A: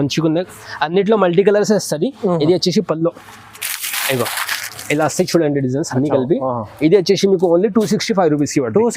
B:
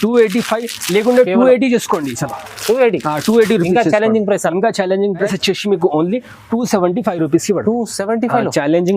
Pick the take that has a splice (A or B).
B